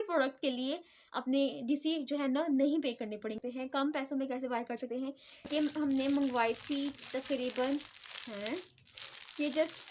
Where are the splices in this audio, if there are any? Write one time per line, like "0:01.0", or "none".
0:03.4
0:05.5